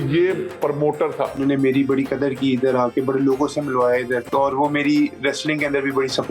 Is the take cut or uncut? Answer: cut